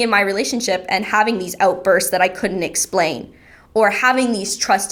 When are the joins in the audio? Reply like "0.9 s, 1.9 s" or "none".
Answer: none